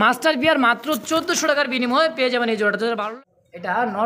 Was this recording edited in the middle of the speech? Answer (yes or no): yes